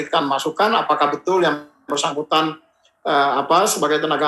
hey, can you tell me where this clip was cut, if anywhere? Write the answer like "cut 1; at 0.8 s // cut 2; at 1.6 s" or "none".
none